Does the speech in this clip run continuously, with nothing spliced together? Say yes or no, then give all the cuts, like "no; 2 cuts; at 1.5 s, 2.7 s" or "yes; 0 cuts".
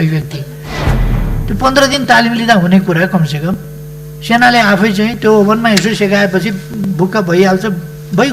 no; 1 cut; at 1.0 s